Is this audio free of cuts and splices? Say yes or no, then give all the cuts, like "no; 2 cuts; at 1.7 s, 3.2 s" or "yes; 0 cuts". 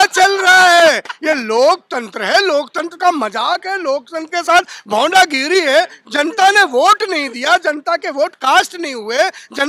yes; 0 cuts